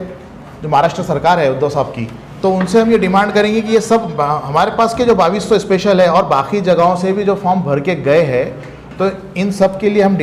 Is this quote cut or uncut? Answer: uncut